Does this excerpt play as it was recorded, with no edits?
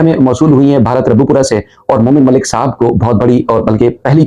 yes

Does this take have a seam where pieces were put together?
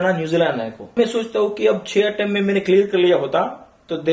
yes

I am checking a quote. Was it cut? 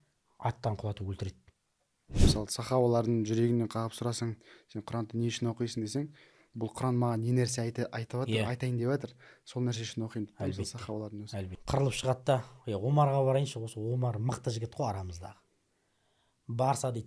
yes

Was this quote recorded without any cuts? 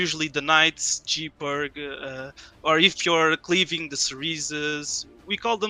yes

